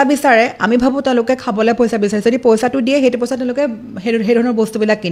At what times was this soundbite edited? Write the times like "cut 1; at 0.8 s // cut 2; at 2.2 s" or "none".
none